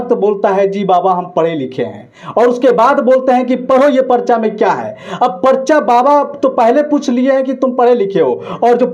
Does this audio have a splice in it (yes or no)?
no